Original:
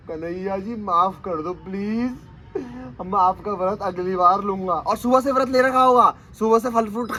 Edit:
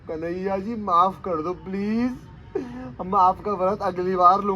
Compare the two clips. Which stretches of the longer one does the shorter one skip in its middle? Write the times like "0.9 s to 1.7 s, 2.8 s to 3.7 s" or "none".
none